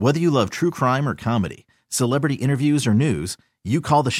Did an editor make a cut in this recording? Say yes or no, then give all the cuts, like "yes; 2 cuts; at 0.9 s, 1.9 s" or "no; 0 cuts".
no; 0 cuts